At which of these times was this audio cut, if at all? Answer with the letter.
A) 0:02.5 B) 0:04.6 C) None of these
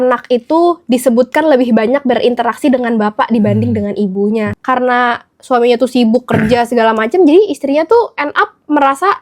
B